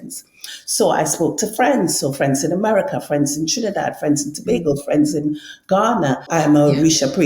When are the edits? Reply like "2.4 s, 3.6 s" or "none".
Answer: 6.3 s